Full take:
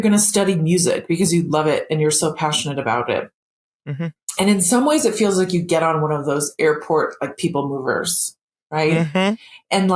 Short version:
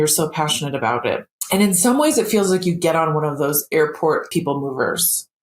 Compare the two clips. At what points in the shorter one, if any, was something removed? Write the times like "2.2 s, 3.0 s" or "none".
1.3 s, 4.3 s